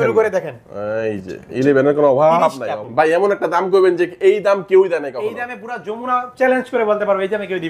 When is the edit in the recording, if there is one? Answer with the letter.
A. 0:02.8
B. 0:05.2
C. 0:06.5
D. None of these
A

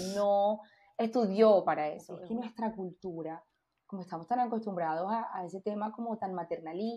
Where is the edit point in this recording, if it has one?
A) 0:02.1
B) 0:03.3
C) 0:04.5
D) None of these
A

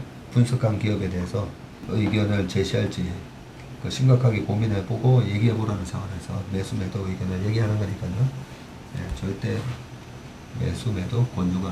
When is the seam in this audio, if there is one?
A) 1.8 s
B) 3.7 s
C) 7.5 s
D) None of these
A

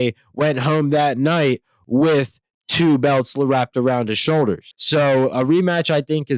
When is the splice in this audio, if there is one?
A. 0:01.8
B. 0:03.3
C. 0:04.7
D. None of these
C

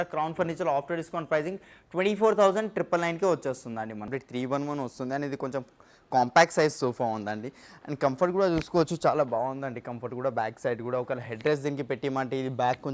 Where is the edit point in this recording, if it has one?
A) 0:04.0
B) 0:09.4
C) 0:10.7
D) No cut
A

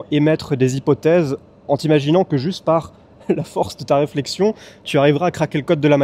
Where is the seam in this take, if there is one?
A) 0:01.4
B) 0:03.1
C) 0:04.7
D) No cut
D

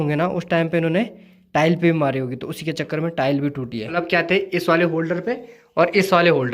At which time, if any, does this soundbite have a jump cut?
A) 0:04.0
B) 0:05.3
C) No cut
A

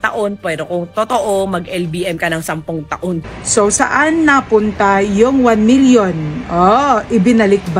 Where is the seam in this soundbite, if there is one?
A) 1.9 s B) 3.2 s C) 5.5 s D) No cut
B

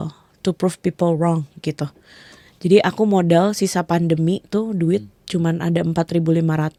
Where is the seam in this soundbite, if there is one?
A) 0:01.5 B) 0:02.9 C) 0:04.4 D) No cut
D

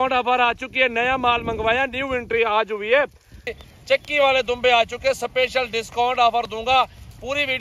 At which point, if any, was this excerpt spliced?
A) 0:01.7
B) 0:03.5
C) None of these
B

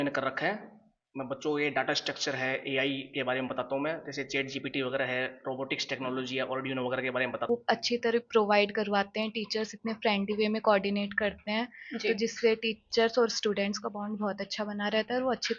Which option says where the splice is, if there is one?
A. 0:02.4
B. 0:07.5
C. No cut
B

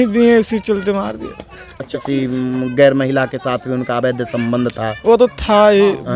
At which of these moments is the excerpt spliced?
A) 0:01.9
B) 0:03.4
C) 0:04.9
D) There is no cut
A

